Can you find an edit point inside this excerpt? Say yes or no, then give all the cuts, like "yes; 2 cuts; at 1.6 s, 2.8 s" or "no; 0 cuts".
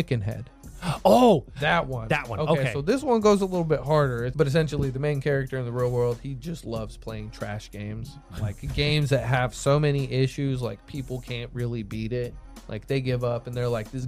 yes; 2 cuts; at 4.3 s, 8.2 s